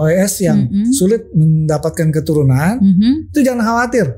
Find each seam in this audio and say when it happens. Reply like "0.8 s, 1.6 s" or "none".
none

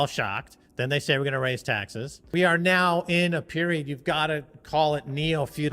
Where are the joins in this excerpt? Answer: 2.2 s

